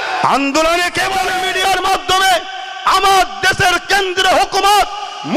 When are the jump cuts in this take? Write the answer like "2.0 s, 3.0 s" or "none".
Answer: 1.4 s